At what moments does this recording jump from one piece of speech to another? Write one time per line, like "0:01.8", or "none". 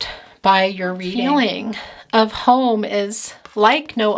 0:01.1